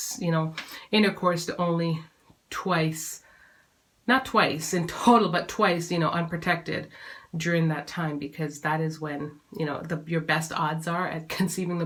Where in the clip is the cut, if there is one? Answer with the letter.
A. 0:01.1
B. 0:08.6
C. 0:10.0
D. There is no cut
D